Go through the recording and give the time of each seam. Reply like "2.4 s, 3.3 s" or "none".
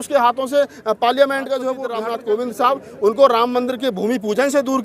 1.9 s